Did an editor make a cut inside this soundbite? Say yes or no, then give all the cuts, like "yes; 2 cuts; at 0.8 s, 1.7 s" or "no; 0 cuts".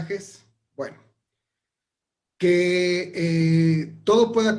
no; 0 cuts